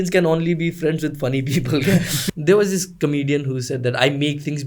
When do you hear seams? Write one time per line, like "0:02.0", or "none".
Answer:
0:02.2

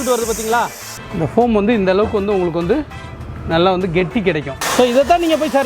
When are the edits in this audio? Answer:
0:01.0
0:04.6

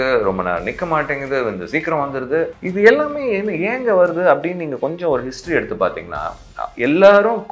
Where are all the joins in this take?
0:02.6

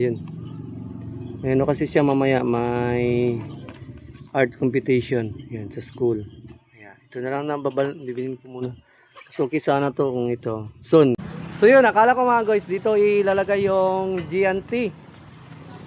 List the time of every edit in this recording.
0:11.3

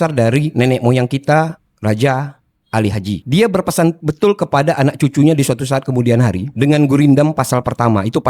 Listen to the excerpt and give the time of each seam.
none

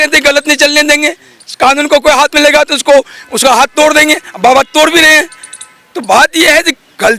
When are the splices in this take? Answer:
none

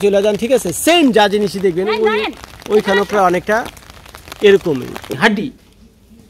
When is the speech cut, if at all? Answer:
0:05.1

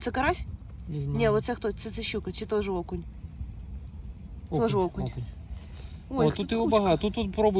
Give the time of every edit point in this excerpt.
none

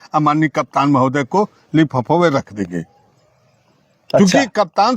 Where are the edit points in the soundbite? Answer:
none

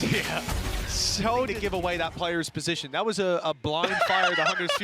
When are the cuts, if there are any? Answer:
0:01.5

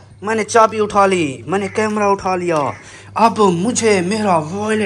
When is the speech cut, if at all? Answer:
none

